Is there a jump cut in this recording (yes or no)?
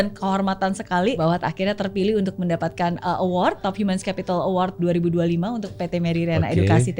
yes